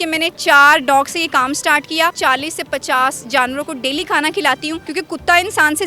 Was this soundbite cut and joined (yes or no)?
yes